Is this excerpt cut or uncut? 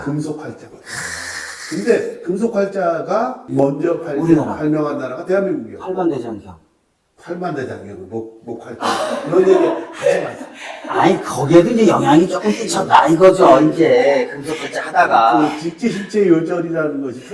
uncut